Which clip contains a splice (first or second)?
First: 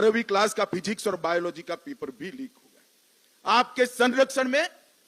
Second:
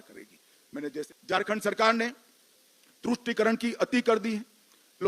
second